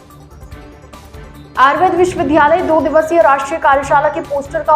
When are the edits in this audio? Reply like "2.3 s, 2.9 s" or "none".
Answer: 1.0 s